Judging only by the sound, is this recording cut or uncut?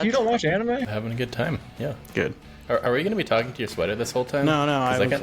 cut